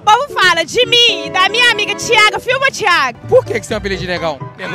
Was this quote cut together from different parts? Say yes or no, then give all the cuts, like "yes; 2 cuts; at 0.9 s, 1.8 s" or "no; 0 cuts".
yes; 1 cut; at 3.2 s